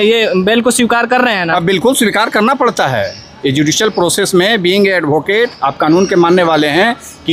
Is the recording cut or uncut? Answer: uncut